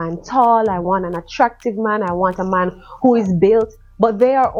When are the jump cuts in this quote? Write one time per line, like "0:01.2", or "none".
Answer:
none